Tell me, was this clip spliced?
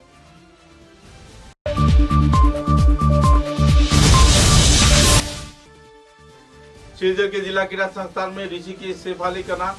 yes; 1 cut; at 1.5 s

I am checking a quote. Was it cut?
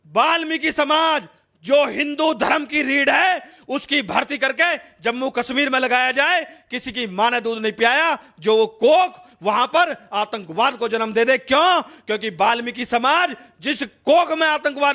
no; 0 cuts

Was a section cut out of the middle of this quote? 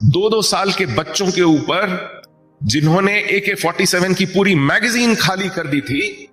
no; 0 cuts

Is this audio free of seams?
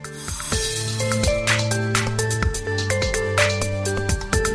yes; 0 cuts

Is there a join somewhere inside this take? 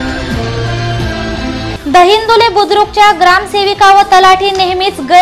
yes; 1 cut; at 1.7 s

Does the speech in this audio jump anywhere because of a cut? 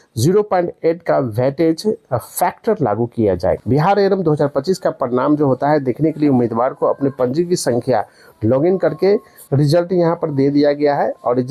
yes; 2 cuts; at 3.6 s, 9.4 s

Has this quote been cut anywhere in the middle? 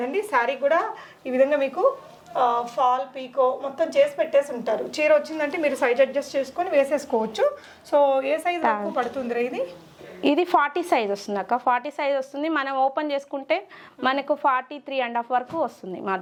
no; 0 cuts

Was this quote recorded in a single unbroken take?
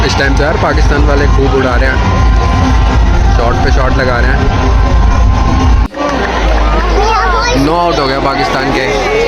yes; 0 cuts

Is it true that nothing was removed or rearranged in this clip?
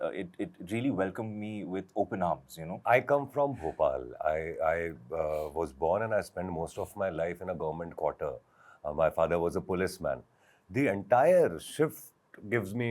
no; 1 cut; at 2.8 s

